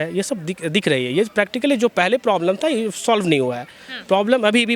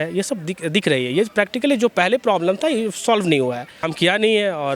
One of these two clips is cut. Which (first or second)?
second